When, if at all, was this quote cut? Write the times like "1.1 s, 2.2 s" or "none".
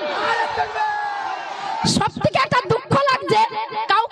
1.3 s

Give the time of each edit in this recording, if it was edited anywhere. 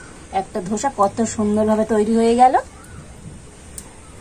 none

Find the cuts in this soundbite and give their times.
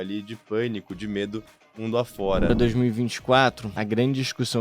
2.5 s, 3.7 s

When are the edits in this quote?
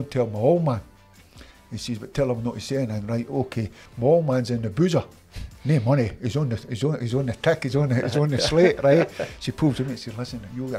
3.8 s

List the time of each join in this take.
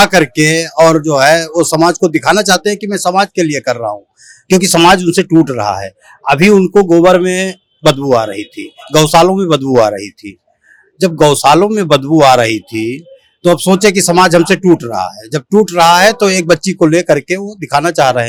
none

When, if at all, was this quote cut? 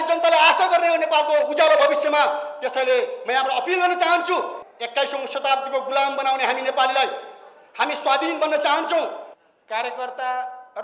4.6 s, 9.3 s

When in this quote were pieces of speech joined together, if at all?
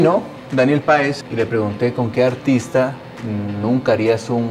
1.2 s

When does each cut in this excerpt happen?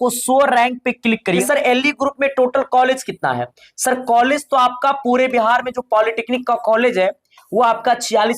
1.4 s

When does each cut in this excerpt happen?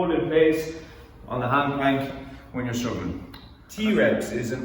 3.7 s

